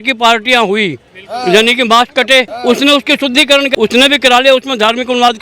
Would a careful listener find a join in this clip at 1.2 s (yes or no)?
no